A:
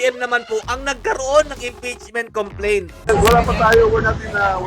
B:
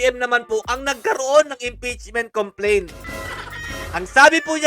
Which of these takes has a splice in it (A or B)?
A